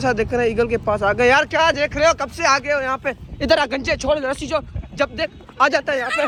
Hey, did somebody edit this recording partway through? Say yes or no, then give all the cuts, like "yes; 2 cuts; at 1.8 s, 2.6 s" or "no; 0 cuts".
no; 0 cuts